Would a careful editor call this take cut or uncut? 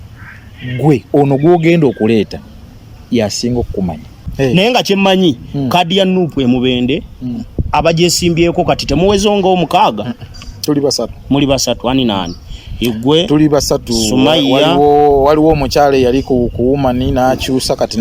cut